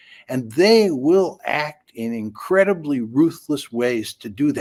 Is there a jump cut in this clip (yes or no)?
no